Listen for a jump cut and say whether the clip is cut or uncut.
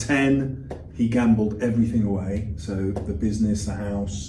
uncut